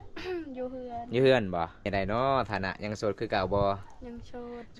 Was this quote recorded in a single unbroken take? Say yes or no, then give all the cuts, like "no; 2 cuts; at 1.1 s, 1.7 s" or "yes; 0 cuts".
no; 1 cut; at 1.9 s